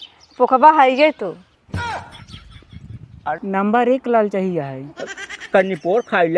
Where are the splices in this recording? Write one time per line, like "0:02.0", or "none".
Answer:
0:03.3